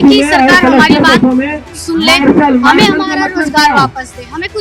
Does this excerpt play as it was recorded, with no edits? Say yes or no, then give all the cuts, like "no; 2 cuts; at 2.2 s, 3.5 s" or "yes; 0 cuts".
yes; 0 cuts